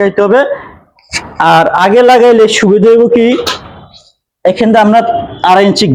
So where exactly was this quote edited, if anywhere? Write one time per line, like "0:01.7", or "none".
none